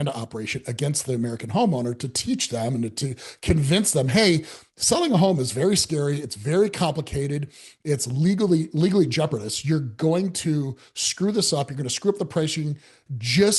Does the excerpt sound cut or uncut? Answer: uncut